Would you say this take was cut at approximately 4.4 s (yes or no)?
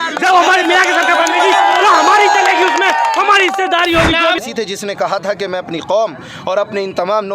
yes